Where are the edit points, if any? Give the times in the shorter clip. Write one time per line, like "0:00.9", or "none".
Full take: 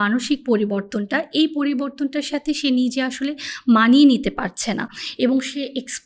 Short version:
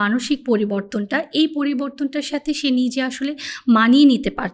none